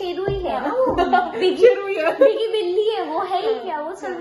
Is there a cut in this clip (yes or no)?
no